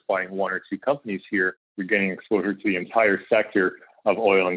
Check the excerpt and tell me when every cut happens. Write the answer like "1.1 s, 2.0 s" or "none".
1.7 s, 2.9 s

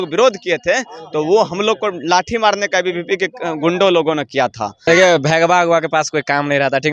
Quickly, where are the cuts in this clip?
4.9 s

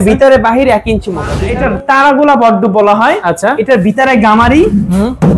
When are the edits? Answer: 1.4 s

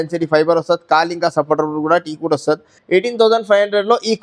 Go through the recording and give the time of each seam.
none

